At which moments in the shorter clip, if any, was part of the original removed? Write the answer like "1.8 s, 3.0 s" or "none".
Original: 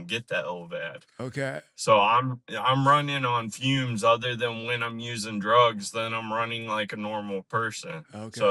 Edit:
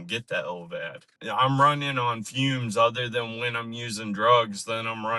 1.1 s